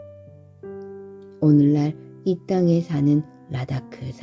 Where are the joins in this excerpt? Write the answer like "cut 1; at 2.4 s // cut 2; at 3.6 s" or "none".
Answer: none